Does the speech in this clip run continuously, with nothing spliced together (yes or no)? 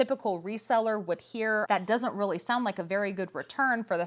no